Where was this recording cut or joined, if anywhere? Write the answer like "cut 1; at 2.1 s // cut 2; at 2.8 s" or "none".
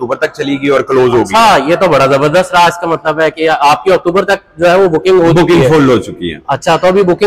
none